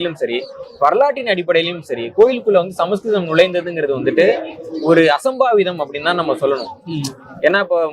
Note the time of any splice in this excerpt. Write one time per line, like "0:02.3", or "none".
none